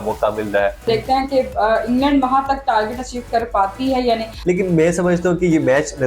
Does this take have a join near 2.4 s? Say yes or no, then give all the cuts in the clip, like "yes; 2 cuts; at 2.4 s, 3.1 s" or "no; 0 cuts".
no; 2 cuts; at 0.8 s, 4.3 s